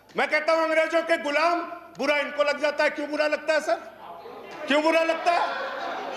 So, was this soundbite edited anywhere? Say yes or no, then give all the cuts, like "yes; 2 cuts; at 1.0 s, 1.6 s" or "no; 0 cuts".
no; 0 cuts